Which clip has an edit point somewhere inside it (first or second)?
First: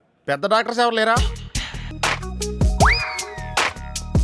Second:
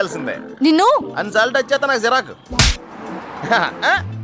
first